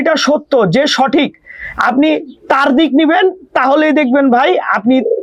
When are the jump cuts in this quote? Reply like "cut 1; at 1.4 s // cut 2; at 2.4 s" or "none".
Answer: none